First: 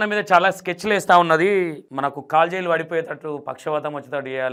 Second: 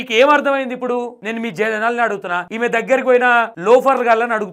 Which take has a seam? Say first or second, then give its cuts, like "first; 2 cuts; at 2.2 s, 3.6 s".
second; 3 cuts; at 1.2 s, 2.5 s, 3.5 s